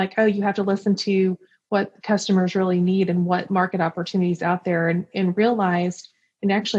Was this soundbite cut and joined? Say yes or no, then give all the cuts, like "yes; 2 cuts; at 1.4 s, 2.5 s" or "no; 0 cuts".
no; 0 cuts